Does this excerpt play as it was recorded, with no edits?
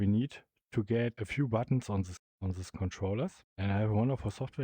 no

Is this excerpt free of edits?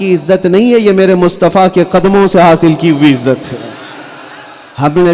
yes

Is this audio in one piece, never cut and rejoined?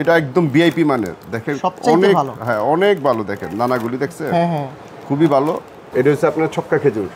no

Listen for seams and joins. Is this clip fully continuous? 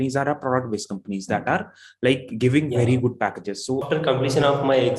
no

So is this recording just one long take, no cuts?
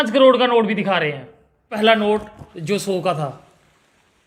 no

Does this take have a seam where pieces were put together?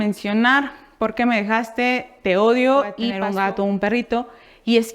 yes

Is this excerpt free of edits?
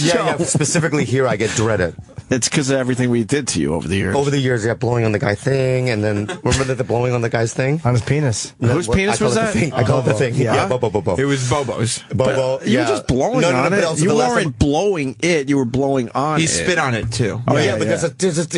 no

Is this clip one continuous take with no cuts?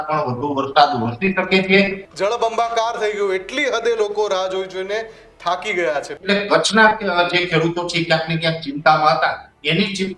no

